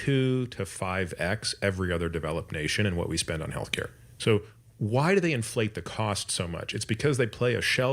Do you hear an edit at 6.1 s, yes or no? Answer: no